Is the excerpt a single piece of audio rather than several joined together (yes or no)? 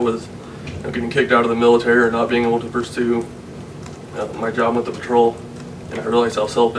yes